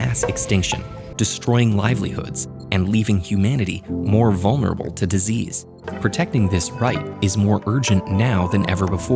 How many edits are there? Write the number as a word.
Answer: two